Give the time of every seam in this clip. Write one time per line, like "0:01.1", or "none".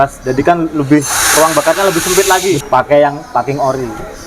0:02.6